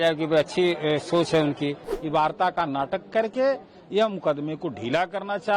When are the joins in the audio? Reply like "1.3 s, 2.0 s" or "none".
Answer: 1.9 s